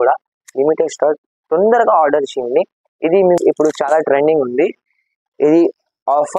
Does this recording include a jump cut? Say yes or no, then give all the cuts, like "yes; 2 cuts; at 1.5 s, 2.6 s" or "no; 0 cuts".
yes; 1 cut; at 3.4 s